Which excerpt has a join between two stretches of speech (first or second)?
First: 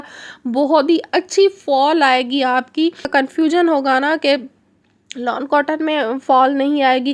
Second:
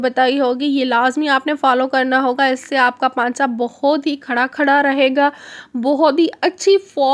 first